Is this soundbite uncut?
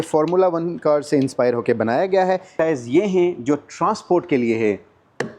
no; 1 cut; at 2.5 s

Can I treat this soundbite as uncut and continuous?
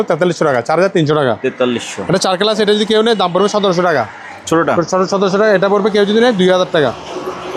yes; 0 cuts

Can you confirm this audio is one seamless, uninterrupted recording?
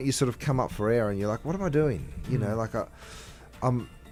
yes; 0 cuts

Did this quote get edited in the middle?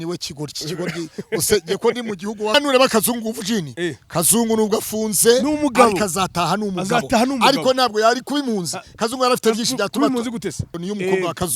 yes; 2 cuts; at 2.6 s, 10.7 s

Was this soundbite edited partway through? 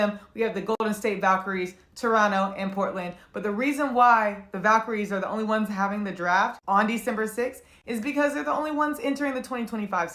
no; 0 cuts

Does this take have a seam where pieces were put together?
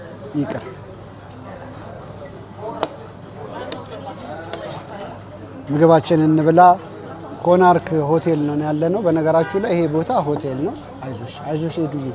no; 0 cuts

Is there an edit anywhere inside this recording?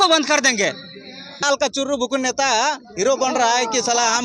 yes; 1 cut; at 1.4 s

